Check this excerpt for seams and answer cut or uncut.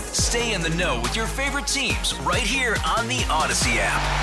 uncut